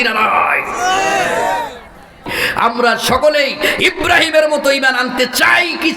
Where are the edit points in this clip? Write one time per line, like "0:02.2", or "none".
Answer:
0:02.3